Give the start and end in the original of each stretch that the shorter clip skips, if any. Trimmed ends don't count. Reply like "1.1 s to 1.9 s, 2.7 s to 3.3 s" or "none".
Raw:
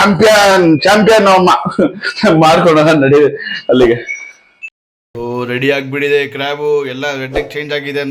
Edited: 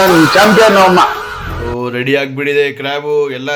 1.7 s to 4.7 s